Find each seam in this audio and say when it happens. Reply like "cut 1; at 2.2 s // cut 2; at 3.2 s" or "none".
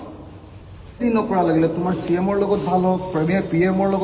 cut 1; at 1.0 s